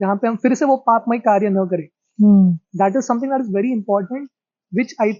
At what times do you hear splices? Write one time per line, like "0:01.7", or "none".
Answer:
none